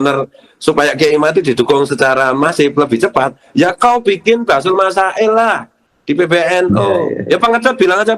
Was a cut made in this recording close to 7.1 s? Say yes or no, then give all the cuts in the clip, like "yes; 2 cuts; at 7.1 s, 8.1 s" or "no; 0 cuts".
yes; 1 cut; at 7.1 s